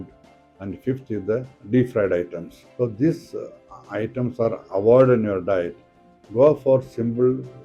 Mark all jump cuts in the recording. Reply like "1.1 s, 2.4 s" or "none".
none

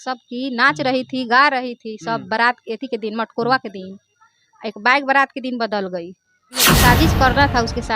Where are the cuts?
6.6 s

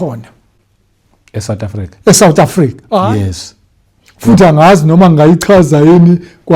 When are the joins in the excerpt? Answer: 3.0 s

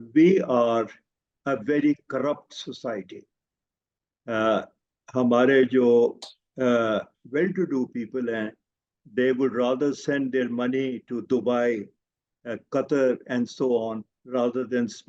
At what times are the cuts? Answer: none

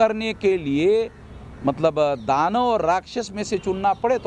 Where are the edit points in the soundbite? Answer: none

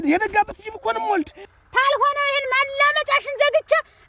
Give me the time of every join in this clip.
1.4 s

